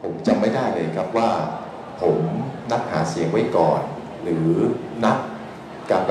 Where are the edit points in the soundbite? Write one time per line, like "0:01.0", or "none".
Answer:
none